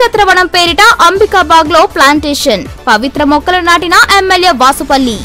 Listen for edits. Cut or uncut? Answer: uncut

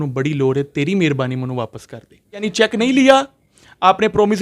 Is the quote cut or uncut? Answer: cut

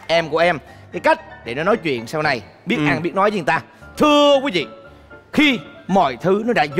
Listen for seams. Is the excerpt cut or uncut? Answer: uncut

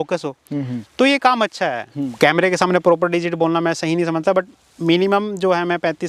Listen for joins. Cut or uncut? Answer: cut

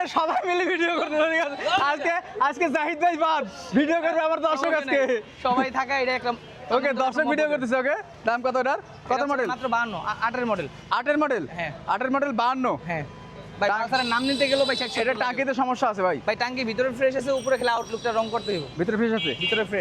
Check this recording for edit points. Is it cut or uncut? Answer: uncut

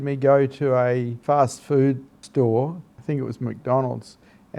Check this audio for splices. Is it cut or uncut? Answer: cut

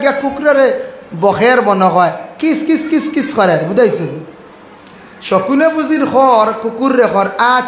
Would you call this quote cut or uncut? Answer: uncut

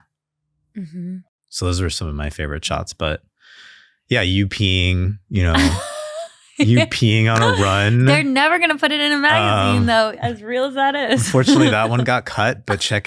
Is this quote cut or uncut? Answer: uncut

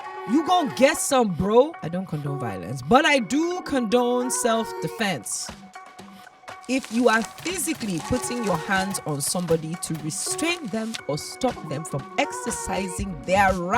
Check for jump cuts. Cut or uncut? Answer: cut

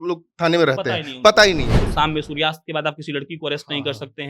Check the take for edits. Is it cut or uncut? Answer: cut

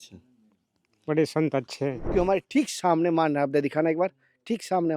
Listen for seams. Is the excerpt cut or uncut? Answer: cut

